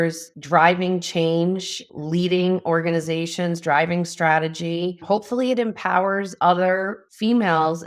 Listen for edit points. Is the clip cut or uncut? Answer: uncut